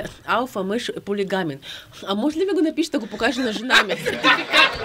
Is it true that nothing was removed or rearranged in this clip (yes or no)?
yes